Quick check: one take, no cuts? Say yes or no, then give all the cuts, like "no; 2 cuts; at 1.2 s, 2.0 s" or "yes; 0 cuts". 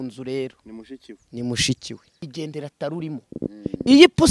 no; 1 cut; at 2.2 s